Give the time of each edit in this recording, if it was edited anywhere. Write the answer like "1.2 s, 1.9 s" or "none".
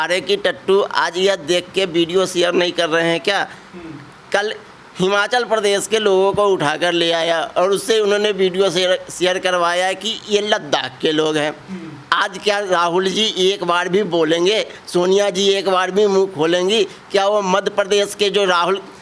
none

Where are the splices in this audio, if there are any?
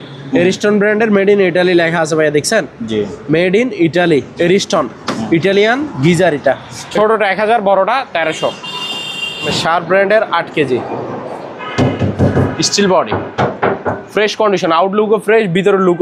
6.8 s, 9.6 s

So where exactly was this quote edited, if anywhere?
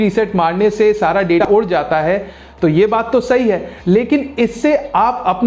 1.4 s

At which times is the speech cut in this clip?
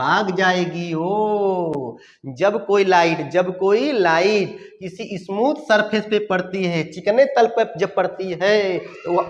none

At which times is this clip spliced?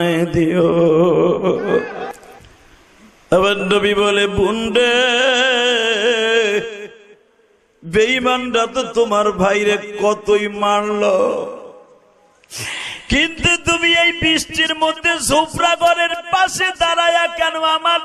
2.1 s

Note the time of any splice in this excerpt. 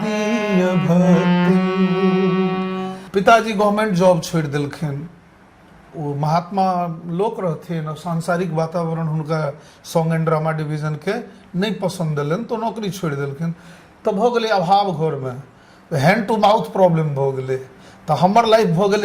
2.9 s

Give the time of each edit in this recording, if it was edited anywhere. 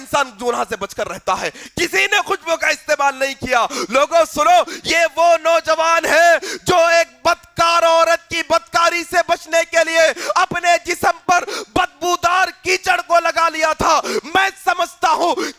1.6 s

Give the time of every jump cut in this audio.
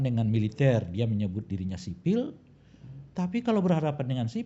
none

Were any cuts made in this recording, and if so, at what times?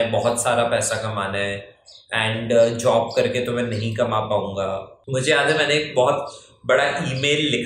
4.9 s

